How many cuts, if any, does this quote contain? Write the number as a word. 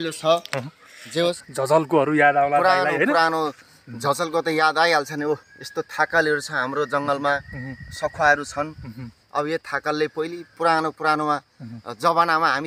one